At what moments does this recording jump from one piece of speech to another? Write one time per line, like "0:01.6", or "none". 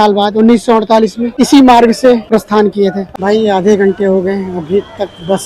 0:03.1